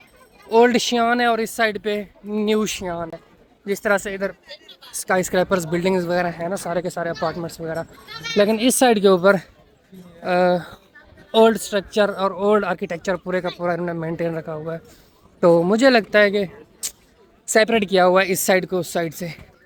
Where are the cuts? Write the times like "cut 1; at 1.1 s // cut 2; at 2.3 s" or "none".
none